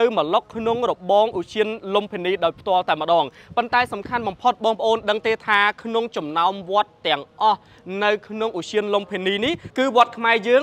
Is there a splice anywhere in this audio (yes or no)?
no